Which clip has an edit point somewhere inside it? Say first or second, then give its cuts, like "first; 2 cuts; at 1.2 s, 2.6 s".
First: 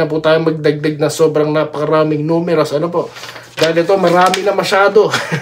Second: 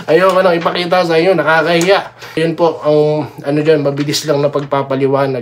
second; 1 cut; at 2.4 s